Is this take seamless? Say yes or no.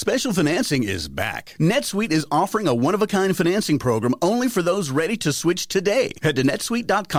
yes